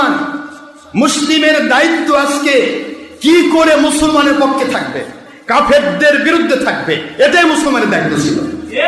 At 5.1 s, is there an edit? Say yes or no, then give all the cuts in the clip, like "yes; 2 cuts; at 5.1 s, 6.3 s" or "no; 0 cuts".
no; 0 cuts